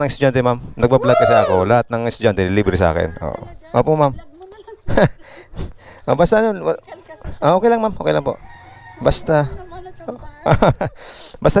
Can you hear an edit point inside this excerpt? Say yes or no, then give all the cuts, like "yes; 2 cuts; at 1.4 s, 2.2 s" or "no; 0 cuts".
no; 0 cuts